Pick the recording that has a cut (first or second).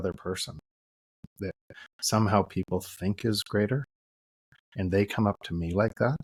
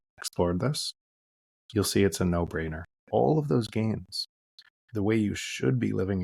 second